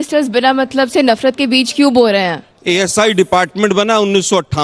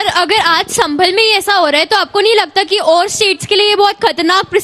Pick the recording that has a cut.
first; 1 cut; at 2.5 s

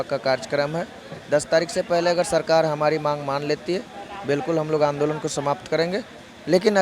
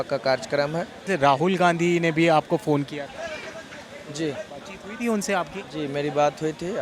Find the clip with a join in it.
second; 1 cut; at 0.9 s

